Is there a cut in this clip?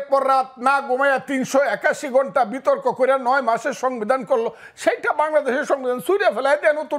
no; 0 cuts

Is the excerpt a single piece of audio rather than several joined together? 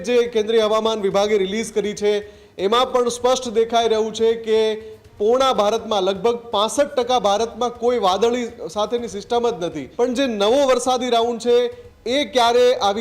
no; 1 cut; at 9.8 s

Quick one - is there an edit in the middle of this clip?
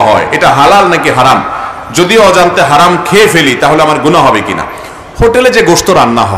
no; 0 cuts

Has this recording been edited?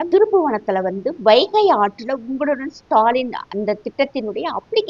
no; 0 cuts

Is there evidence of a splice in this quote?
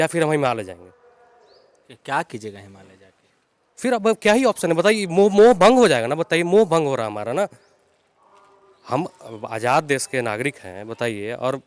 no; 0 cuts

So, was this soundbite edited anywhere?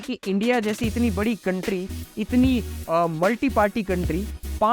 no; 0 cuts

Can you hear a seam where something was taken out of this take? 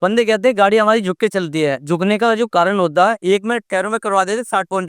yes; 2 cuts; at 1.8 s, 3.2 s

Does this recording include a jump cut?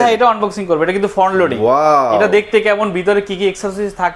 no; 0 cuts

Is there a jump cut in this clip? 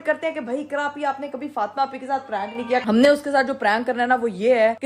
yes; 1 cut; at 2.8 s

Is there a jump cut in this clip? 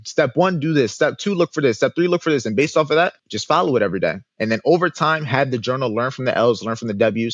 yes; 1 cut; at 3.3 s

